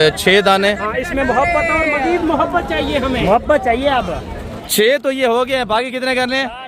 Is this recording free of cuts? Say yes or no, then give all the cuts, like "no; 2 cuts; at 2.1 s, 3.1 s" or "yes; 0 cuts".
no; 1 cut; at 4.5 s